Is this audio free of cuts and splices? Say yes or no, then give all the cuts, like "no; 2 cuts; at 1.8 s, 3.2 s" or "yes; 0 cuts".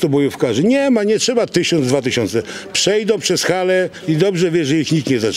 yes; 0 cuts